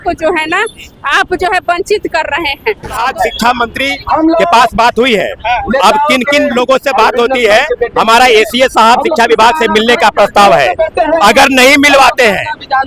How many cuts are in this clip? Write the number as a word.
one